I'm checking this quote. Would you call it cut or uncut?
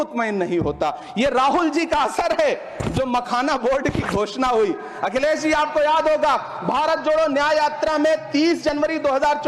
uncut